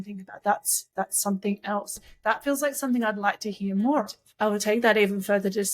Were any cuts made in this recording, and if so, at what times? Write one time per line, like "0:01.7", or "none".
0:04.2